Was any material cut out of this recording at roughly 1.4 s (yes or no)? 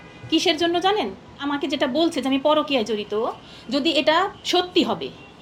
yes